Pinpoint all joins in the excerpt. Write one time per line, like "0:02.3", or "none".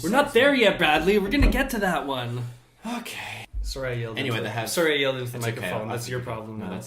0:03.4